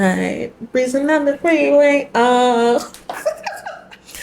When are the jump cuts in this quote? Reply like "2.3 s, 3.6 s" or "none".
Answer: none